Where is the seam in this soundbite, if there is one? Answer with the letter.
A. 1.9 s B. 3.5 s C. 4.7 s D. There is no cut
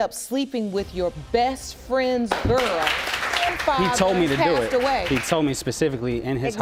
D